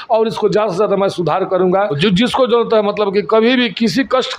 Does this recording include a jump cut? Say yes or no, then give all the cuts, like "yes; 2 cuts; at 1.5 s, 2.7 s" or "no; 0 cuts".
yes; 1 cut; at 2.0 s